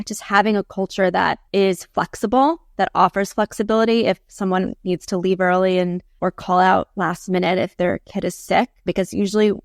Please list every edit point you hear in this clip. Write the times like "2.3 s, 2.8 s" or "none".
1.4 s, 6.1 s, 8.8 s